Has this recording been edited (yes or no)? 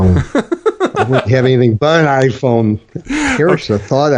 no